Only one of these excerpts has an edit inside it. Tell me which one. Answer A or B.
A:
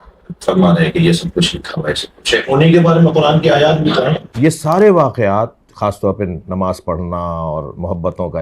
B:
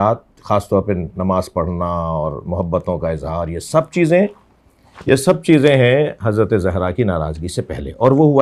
A